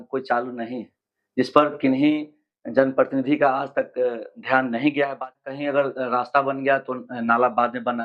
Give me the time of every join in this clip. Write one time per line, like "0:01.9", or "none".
0:05.5